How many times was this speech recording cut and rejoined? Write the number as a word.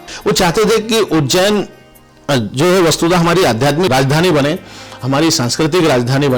one